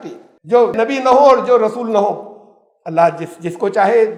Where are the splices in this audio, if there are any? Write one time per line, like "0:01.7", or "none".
none